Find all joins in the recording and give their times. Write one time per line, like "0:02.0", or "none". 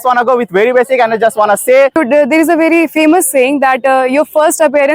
0:02.0

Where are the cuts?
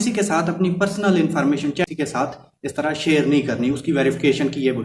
0:01.8

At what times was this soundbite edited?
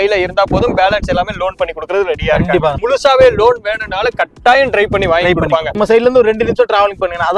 0:02.8
0:05.7

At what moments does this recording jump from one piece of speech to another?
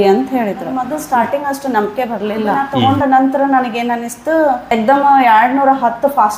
0:00.9
0:02.7
0:04.7

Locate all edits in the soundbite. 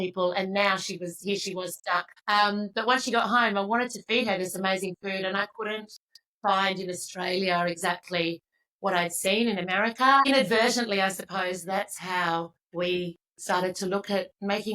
0:02.1
0:10.3
0:12.6

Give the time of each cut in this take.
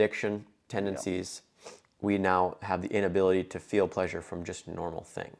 none

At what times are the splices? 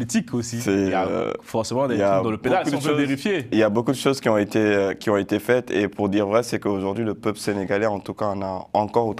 none

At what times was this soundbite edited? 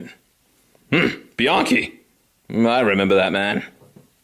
0:02.5

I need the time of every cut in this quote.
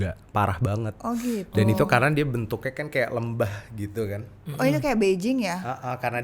none

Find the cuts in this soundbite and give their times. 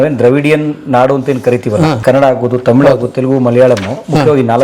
0:02.0

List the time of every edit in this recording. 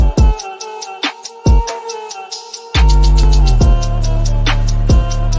0:03.2

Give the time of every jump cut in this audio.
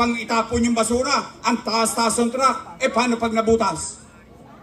none

